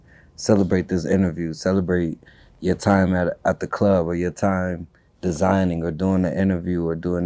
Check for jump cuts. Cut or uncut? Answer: uncut